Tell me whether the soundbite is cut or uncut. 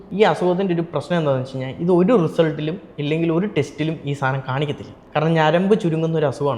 cut